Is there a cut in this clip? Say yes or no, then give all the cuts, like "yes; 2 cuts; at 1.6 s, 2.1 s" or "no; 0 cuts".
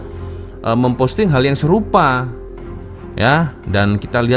no; 0 cuts